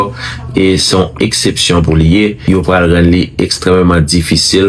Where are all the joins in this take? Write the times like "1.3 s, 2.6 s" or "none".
2.4 s